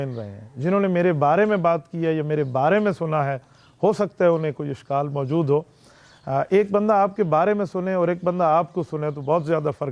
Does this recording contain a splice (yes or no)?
no